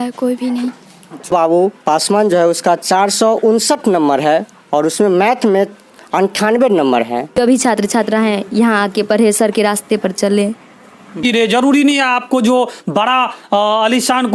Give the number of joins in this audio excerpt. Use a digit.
3